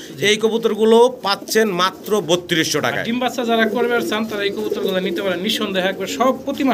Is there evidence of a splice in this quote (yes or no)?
no